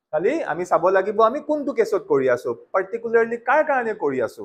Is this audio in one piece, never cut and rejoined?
yes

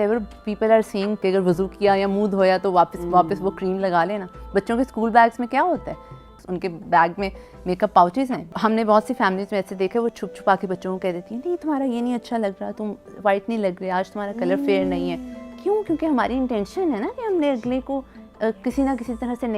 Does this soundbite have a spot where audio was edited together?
yes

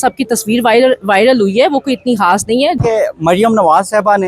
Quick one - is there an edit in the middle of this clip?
yes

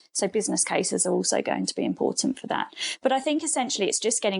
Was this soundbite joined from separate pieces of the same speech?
no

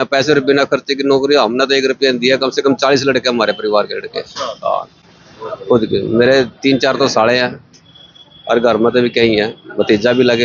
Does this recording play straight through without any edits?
yes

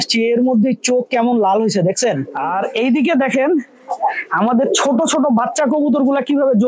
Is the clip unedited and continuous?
no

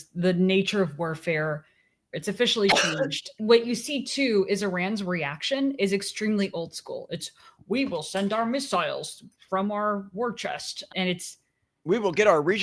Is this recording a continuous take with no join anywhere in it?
no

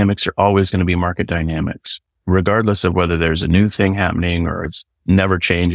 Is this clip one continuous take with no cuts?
yes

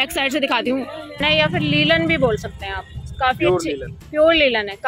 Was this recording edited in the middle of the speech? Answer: yes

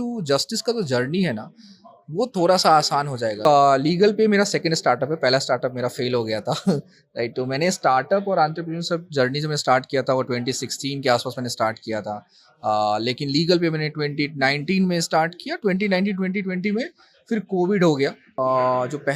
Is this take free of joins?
no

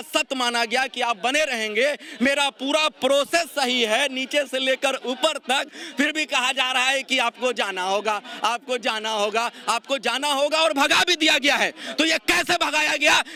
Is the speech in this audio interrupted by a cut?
no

